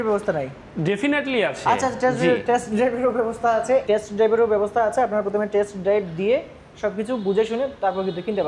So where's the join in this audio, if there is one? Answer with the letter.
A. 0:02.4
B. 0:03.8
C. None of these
B